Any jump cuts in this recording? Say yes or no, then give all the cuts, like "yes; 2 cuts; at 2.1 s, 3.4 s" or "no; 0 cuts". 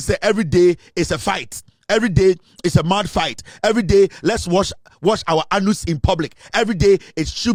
no; 0 cuts